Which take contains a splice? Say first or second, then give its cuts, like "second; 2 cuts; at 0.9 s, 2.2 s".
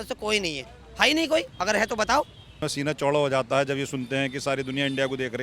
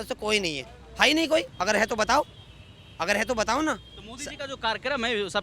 first; 1 cut; at 2.7 s